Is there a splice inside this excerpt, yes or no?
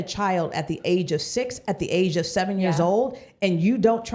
no